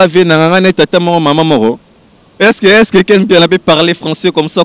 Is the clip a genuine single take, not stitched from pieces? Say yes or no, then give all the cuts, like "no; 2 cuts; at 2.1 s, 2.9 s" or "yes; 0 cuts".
no; 1 cut; at 2.2 s